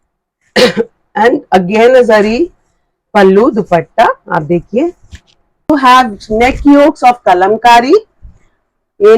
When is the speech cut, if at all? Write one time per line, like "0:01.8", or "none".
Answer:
0:05.7